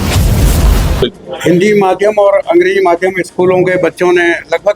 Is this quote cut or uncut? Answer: cut